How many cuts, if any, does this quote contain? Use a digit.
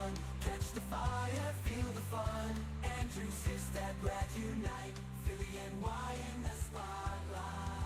0